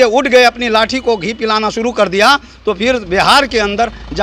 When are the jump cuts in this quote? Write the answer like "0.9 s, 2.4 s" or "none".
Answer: none